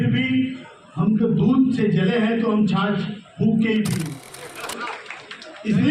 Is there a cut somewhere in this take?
yes; 1 cut; at 4.0 s

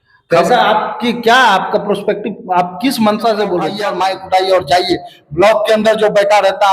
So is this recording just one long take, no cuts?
no; 1 cut; at 3.7 s

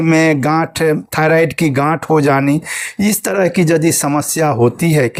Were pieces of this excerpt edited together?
no; 0 cuts

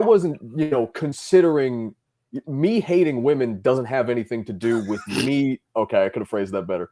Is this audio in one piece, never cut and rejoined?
yes; 0 cuts

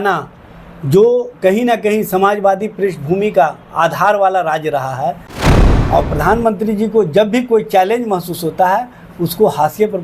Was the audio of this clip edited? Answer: yes; 1 cut; at 5.5 s

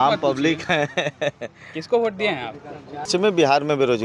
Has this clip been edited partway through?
yes; 1 cut; at 3.1 s

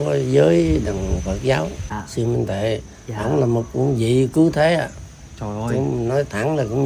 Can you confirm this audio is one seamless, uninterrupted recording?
no; 1 cut; at 1.9 s

